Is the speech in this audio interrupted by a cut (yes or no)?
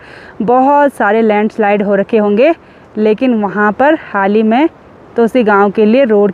no